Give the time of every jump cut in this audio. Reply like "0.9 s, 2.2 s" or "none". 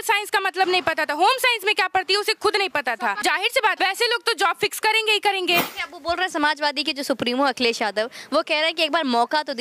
3.6 s, 5.8 s